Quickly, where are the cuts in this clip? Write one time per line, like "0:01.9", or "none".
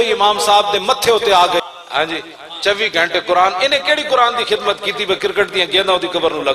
0:01.6